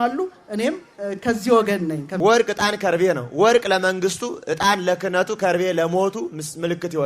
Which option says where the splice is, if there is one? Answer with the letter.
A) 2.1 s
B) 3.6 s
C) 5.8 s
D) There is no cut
A